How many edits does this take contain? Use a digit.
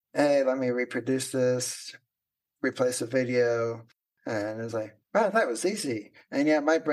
0